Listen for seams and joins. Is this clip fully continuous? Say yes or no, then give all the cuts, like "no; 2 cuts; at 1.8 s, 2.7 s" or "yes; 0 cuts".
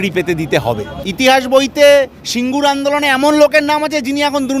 no; 1 cut; at 1.0 s